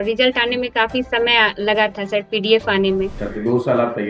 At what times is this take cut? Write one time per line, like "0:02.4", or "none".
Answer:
0:03.2